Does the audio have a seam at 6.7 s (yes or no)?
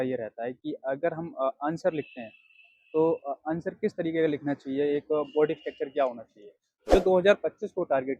yes